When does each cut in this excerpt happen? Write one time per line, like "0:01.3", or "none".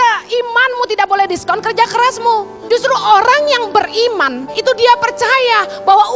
0:02.5
0:04.4